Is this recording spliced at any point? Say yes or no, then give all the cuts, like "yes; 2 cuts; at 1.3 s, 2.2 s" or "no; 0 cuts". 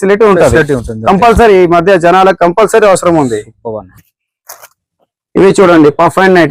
no; 0 cuts